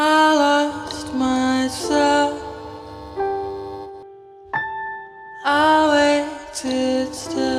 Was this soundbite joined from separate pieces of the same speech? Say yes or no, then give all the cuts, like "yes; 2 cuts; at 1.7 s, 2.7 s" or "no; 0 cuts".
no; 0 cuts